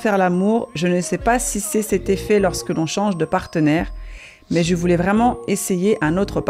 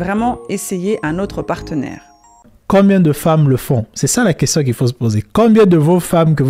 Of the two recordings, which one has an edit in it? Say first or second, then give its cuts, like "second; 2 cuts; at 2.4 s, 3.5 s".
second; 1 cut; at 2.6 s